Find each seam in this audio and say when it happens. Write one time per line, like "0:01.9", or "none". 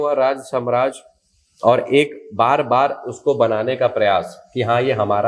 none